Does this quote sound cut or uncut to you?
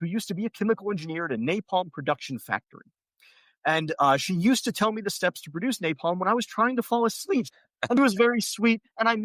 uncut